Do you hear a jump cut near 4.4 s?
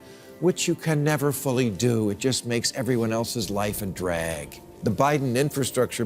yes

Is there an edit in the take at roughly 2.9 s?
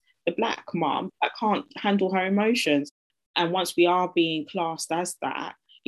yes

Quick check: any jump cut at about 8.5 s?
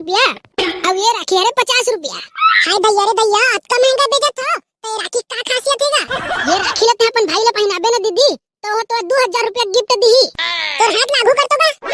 no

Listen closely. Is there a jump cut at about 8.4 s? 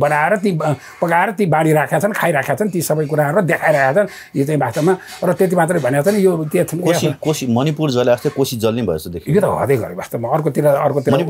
no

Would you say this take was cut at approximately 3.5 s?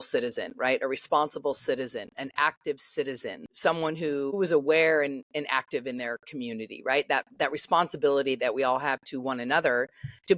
yes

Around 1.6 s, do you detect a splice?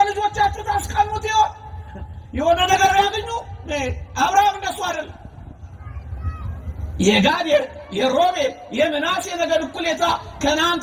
no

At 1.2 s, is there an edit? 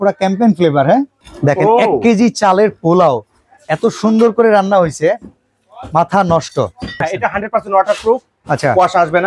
yes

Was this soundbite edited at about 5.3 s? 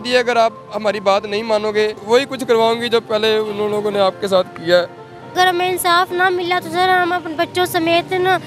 yes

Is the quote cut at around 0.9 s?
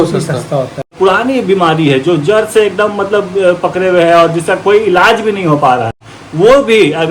yes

